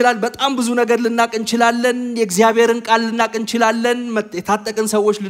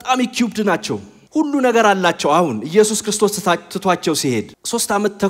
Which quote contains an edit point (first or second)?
second